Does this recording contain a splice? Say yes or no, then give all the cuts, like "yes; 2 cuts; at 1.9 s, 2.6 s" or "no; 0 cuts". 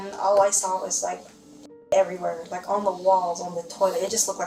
no; 0 cuts